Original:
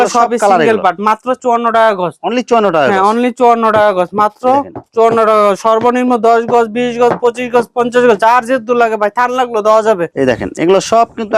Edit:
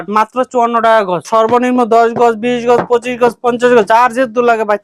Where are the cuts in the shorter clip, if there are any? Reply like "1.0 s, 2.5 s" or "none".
1.3 s